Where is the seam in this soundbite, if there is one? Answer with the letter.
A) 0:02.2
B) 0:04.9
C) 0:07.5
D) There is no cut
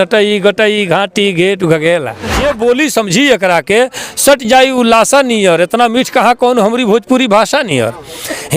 A